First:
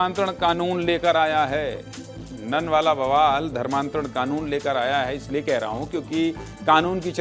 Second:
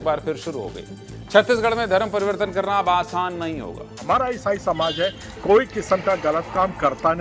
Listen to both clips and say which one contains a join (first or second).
second